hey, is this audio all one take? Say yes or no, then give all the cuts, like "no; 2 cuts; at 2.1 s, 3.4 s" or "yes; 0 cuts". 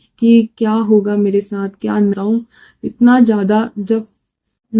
no; 1 cut; at 2.1 s